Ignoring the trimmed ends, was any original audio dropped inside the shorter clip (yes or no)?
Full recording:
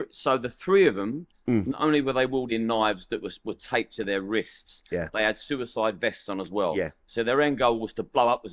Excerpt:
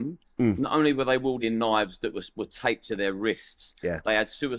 no